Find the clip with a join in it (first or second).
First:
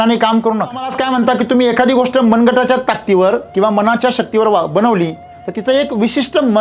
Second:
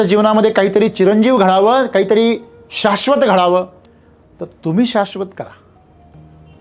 first